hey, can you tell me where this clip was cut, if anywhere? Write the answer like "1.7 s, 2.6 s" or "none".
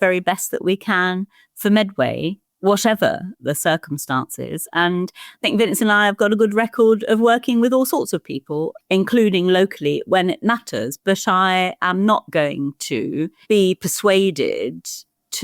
3.4 s, 13.4 s